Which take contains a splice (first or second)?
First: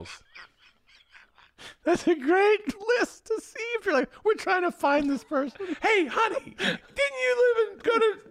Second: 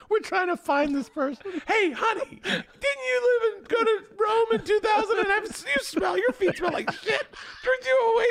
first